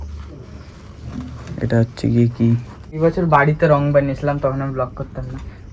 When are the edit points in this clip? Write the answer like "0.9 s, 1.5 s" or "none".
2.9 s